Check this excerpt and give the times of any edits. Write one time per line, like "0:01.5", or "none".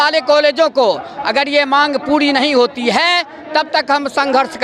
none